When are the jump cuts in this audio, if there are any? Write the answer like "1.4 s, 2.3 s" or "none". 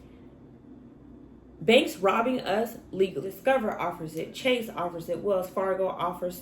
3.3 s